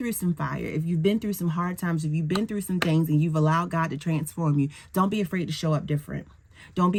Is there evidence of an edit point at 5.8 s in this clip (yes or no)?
no